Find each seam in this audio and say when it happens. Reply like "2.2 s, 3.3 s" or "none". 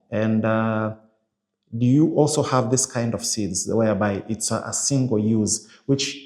none